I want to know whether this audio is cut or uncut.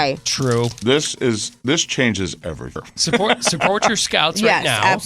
cut